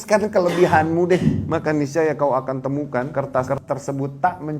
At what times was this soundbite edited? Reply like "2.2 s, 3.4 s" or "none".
1.4 s, 3.1 s